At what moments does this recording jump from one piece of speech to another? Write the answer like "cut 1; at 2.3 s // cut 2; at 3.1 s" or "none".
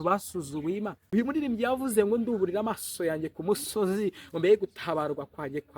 cut 1; at 1.0 s